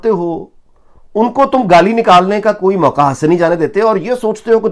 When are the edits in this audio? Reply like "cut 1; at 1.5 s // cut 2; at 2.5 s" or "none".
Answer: none